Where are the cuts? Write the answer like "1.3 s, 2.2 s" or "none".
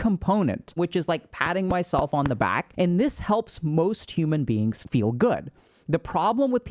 0.8 s, 2.6 s, 4.8 s